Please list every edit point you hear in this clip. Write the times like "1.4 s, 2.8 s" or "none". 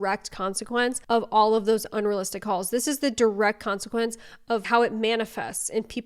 1.0 s, 4.6 s